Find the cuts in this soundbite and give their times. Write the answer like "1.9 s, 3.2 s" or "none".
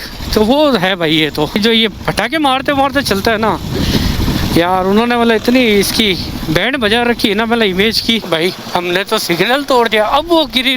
1.6 s, 8.3 s